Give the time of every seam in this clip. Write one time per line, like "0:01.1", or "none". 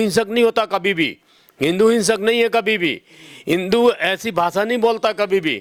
none